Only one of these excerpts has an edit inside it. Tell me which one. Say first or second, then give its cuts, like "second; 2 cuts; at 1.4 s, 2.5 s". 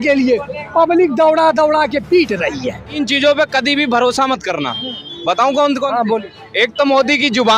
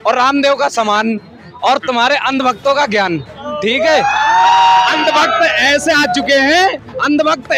first; 1 cut; at 2.9 s